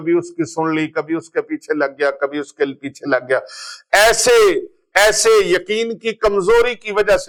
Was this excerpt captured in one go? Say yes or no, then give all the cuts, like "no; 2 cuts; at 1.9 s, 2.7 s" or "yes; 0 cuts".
yes; 0 cuts